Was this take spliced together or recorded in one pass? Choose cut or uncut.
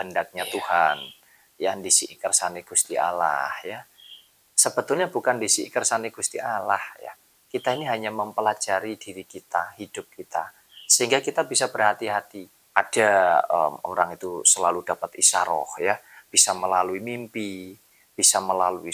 cut